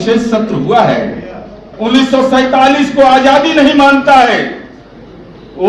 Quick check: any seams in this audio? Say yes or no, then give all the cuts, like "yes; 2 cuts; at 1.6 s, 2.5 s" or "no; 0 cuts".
yes; 1 cut; at 1.7 s